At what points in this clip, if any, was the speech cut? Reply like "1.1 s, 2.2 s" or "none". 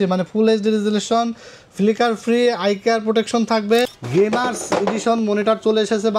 4.0 s